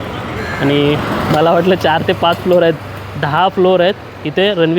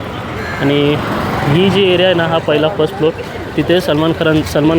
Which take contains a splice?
first; 1 cut; at 1.3 s

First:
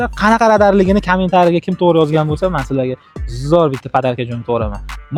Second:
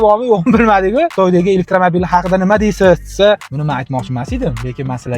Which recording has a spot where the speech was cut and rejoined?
second; 2 cuts; at 1.1 s, 3.5 s

